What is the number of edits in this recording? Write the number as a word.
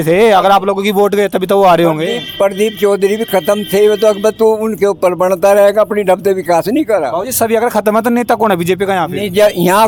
zero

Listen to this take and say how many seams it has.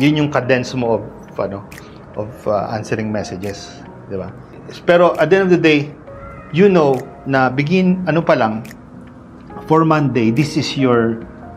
one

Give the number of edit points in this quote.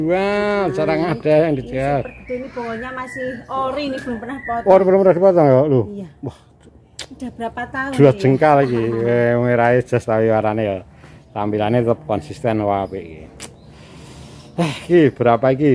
zero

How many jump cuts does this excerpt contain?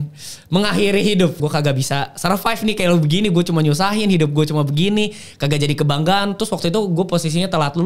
one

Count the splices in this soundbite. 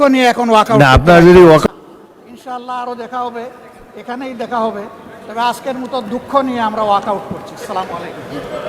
one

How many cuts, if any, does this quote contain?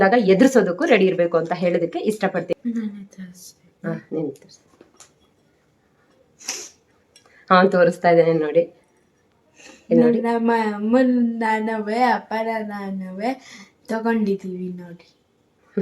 one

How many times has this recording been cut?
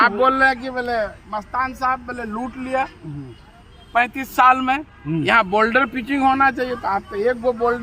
zero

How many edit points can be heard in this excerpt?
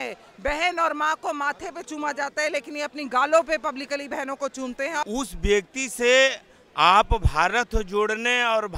one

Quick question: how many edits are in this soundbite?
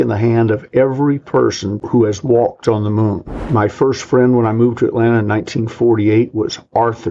one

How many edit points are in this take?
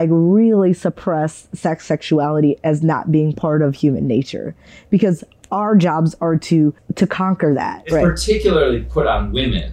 two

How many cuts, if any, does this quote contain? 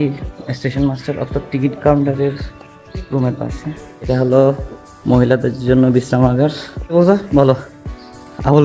two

